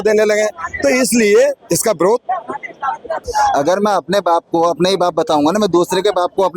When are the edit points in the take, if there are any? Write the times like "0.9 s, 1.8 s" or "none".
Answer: 3.2 s